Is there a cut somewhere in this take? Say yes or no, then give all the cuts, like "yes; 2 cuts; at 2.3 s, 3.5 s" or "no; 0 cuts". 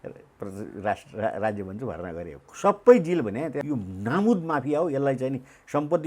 yes; 1 cut; at 3.6 s